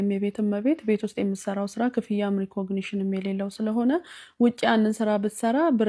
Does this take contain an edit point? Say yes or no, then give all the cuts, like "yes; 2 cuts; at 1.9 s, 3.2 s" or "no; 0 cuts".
no; 0 cuts